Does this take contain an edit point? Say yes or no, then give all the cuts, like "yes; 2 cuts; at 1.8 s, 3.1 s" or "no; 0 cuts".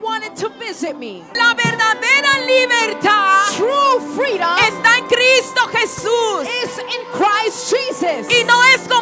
yes; 1 cut; at 1.3 s